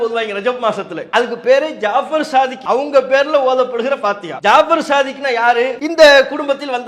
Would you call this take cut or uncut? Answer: cut